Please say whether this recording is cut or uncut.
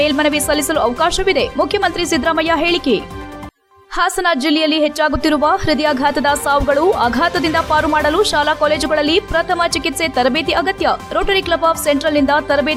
uncut